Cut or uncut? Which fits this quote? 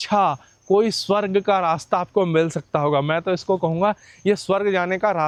uncut